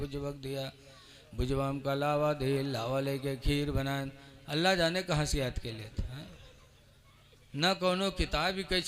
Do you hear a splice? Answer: no; 0 cuts

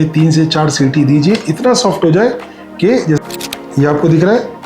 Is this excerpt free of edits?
no; 1 cut; at 3.2 s

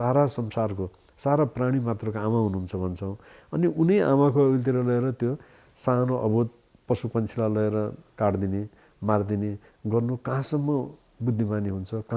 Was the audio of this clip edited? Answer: no; 0 cuts

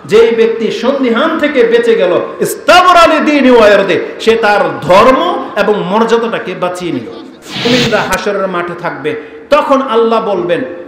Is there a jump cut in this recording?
yes; 1 cut; at 7.7 s

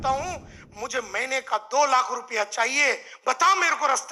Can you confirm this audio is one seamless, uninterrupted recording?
yes; 0 cuts

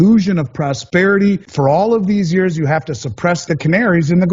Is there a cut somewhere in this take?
yes; 2 cuts; at 1.5 s, 3.4 s

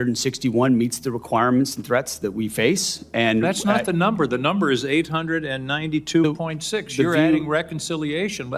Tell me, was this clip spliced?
no; 0 cuts

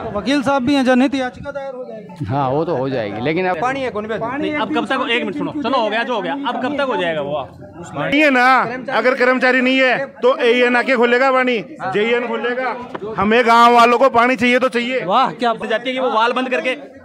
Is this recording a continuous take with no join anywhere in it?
no; 3 cuts; at 3.6 s, 8.1 s, 15.6 s

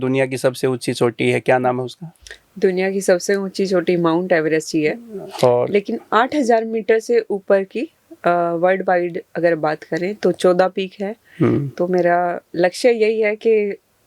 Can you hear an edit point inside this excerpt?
no; 0 cuts

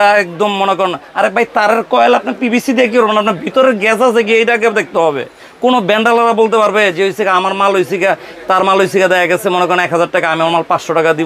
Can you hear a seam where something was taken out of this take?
no; 0 cuts

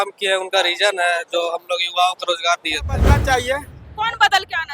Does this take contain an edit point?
yes; 1 cut; at 3.0 s

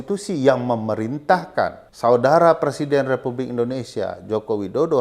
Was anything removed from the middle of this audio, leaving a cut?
yes; 1 cut; at 1.8 s

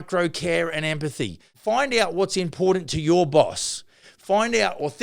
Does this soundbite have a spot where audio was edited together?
yes; 1 cut; at 1.5 s

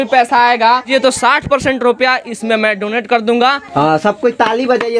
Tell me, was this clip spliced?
yes; 2 cuts; at 0.9 s, 3.7 s

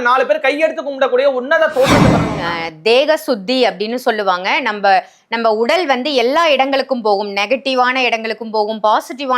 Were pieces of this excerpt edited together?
yes; 1 cut; at 2.3 s

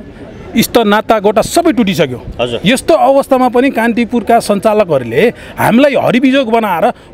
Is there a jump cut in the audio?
no; 0 cuts

